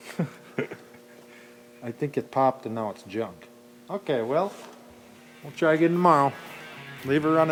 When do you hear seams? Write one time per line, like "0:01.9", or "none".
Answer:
none